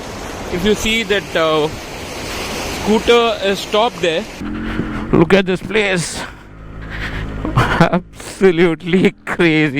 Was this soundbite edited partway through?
yes; 1 cut; at 4.4 s

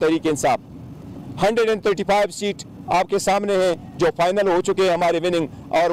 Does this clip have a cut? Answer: no; 0 cuts

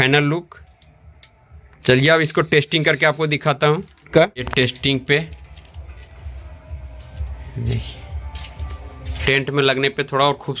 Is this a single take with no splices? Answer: no; 2 cuts; at 4.0 s, 9.2 s

